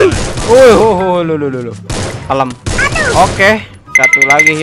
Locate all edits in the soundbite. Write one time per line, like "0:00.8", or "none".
0:01.9